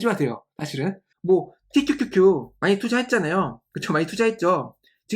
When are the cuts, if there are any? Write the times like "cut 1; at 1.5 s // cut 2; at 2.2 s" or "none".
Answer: cut 1; at 1.1 s